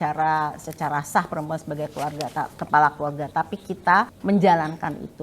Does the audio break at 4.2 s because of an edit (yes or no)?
yes